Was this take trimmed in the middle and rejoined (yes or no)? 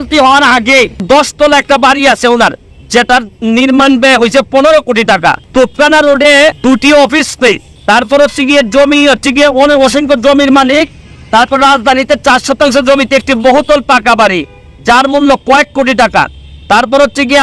yes